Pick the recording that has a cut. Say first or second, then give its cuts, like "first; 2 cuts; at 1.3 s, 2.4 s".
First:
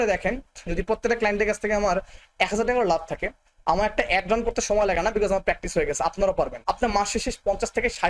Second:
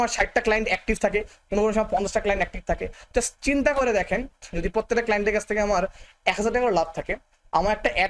first; 1 cut; at 6.6 s